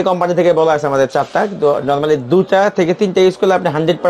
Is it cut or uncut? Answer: uncut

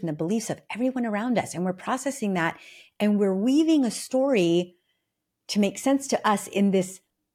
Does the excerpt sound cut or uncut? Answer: uncut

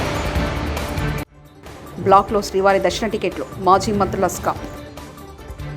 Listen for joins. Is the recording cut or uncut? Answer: uncut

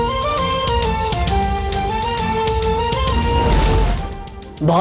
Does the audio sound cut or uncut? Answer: uncut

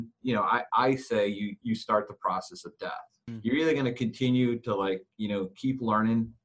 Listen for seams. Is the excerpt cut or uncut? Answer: cut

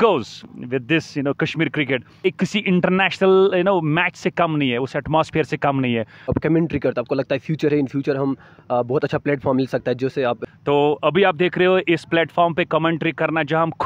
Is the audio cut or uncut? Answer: cut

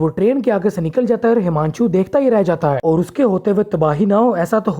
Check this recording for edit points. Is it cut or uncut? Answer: cut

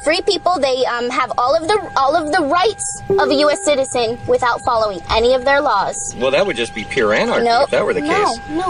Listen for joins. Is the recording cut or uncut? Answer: uncut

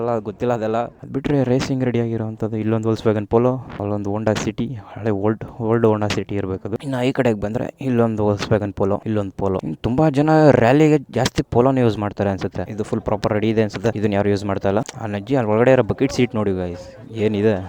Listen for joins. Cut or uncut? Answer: cut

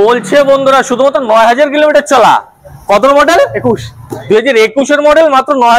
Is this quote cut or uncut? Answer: uncut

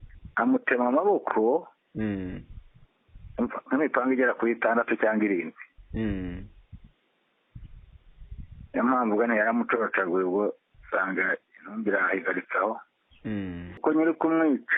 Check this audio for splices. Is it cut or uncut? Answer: cut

